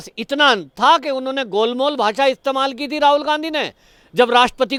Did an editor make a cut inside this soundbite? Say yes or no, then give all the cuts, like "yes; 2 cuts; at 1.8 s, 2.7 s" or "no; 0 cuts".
no; 0 cuts